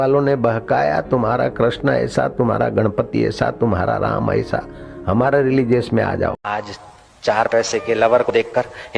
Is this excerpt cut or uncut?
cut